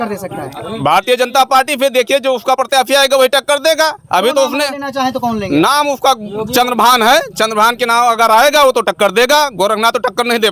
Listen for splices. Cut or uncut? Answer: uncut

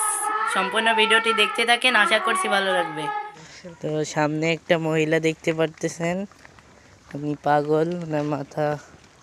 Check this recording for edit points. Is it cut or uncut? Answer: cut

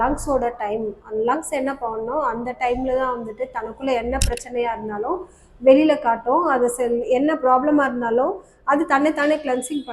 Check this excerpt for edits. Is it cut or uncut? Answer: uncut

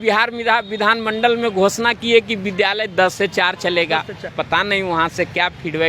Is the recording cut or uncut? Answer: cut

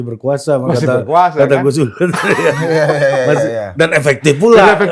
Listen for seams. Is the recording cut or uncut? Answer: uncut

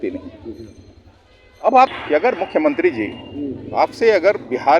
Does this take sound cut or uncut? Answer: cut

